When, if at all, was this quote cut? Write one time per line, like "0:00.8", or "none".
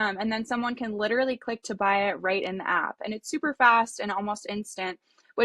none